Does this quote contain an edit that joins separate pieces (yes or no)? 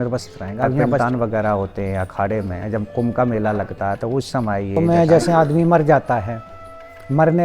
yes